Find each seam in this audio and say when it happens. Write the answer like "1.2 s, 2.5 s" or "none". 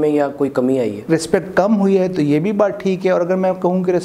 1.0 s